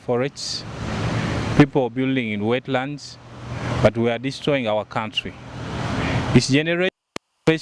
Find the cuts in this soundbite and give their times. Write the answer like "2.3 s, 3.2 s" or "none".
none